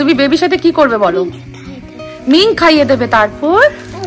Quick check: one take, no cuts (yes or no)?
yes